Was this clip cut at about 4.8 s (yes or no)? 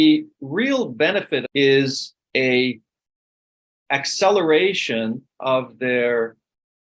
no